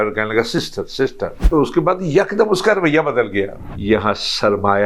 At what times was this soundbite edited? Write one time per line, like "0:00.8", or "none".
0:01.5
0:03.6